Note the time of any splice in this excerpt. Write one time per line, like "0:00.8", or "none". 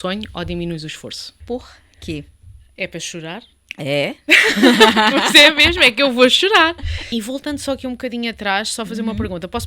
0:01.4
0:06.9